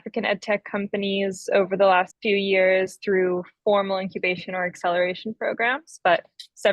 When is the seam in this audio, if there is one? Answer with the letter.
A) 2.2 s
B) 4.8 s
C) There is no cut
A